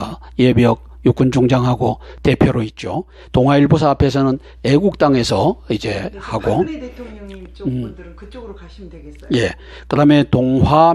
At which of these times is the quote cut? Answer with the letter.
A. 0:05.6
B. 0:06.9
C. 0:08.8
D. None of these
D